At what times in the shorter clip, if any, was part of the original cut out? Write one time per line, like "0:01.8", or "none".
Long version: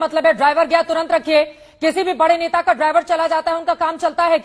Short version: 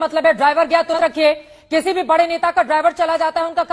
0:00.9